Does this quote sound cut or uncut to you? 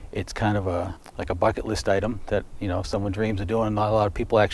cut